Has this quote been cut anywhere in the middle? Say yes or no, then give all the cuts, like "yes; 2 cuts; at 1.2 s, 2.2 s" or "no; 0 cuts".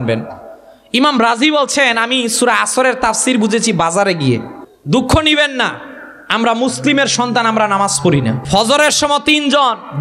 yes; 2 cuts; at 4.6 s, 8.4 s